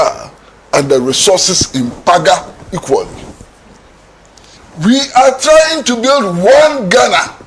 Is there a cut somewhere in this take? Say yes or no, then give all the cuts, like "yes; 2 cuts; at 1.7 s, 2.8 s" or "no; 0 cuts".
yes; 1 cut; at 4.6 s